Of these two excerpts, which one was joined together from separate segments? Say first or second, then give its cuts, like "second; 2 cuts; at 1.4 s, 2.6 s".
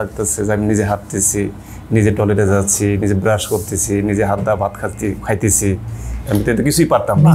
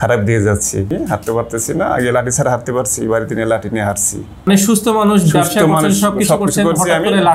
second; 2 cuts; at 0.9 s, 4.5 s